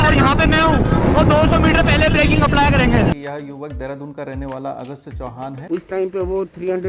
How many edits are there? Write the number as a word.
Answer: two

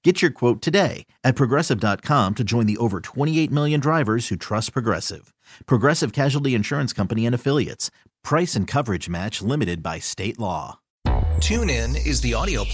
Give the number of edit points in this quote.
one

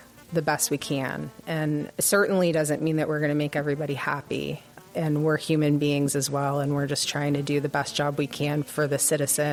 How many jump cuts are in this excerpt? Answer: zero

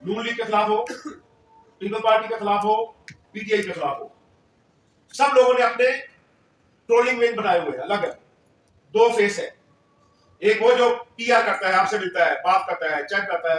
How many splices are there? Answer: zero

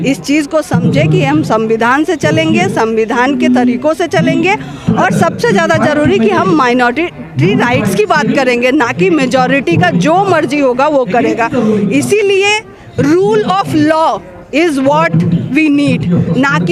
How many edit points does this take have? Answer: zero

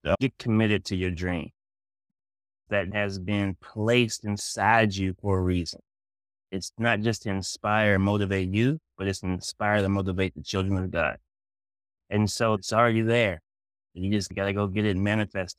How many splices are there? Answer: three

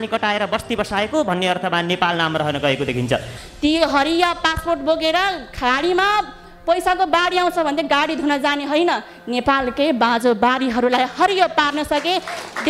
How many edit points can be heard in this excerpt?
one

